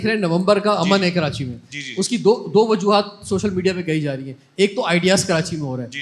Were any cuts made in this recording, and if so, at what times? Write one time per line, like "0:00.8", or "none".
none